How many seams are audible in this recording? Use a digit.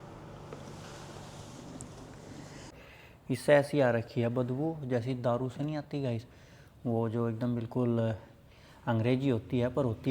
1